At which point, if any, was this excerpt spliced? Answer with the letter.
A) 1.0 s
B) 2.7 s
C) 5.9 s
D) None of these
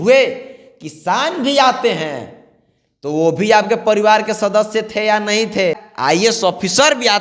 C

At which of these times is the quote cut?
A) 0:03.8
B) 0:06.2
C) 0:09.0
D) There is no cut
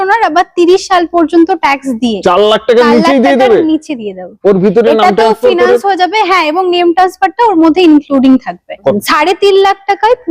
C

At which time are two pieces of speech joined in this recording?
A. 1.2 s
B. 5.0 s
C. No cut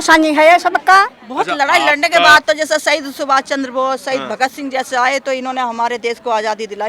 A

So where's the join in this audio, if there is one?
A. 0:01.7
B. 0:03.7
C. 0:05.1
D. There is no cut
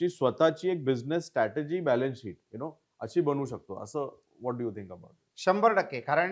D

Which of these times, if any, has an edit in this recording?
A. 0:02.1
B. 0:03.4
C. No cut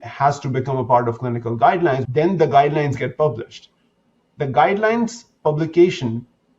A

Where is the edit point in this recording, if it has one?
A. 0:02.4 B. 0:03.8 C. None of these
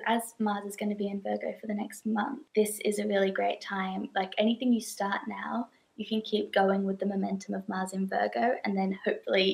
A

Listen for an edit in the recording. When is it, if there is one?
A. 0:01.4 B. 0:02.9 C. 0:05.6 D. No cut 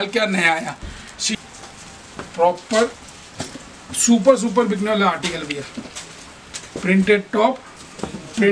A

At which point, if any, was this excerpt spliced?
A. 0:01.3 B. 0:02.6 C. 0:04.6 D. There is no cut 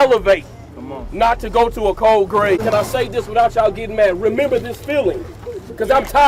B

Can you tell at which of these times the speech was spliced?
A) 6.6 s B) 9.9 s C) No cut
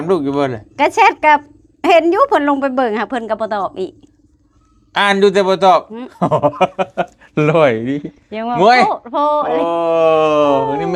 C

